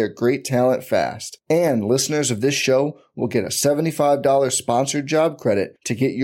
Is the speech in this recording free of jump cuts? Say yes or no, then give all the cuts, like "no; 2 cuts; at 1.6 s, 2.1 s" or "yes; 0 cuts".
yes; 0 cuts